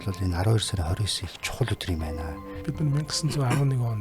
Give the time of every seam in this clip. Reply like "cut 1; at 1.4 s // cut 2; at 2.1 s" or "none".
cut 1; at 2.5 s